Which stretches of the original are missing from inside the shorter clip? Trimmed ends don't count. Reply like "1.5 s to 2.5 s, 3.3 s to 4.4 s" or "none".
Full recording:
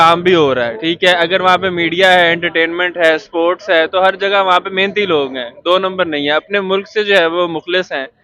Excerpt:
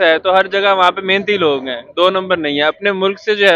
none